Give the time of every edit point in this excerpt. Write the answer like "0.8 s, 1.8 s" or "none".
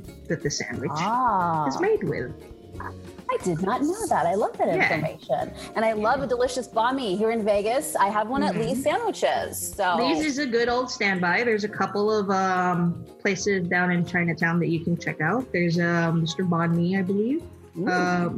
none